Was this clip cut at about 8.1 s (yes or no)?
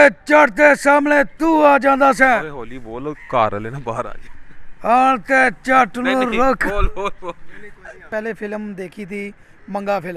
yes